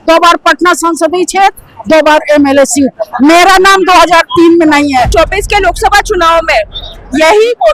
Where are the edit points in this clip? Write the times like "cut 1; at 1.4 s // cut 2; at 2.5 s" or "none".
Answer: cut 1; at 5.1 s